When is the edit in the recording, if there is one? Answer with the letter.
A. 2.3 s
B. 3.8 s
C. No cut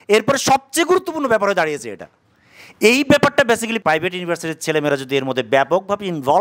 B